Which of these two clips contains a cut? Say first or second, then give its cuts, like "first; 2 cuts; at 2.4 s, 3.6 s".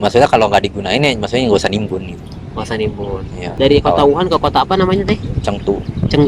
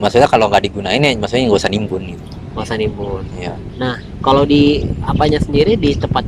first; 1 cut; at 3.5 s